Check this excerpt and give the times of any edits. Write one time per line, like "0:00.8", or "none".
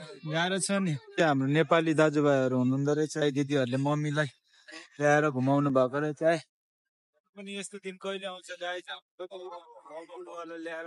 0:01.0
0:03.2